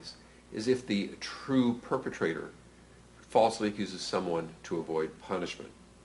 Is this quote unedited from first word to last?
no; 1 cut; at 2.6 s

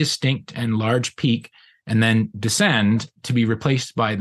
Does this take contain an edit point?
yes; 2 cuts; at 1.9 s, 3.2 s

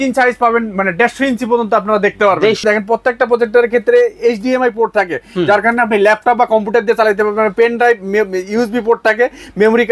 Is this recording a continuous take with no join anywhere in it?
no; 1 cut; at 2.6 s

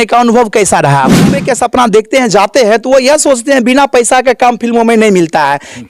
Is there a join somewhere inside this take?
yes; 1 cut; at 1.4 s

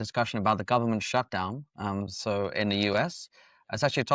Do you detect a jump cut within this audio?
no; 0 cuts

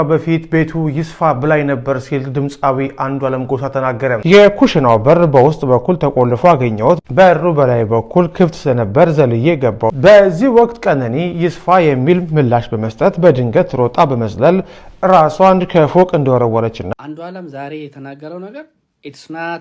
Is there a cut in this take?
yes; 3 cuts; at 4.2 s, 10.0 s, 16.9 s

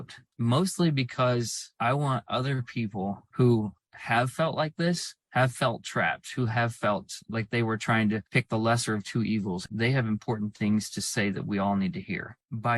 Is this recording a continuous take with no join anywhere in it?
no; 1 cut; at 9.7 s

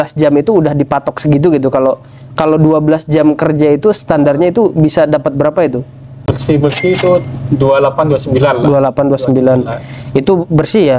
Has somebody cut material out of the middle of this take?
yes; 1 cut; at 6.3 s

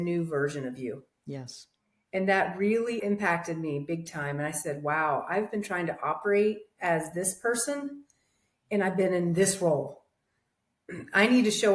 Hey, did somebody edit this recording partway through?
yes; 1 cut; at 3.0 s

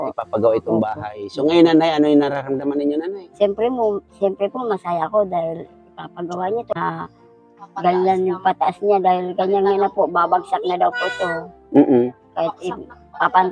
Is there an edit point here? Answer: yes; 1 cut; at 6.7 s

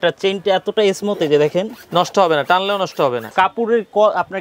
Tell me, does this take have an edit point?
yes; 1 cut; at 3.3 s

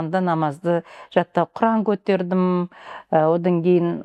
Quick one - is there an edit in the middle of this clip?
no; 0 cuts

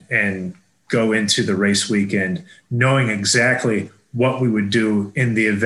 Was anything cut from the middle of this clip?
no; 0 cuts

